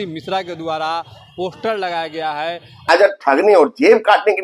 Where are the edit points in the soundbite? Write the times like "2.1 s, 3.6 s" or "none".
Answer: 2.9 s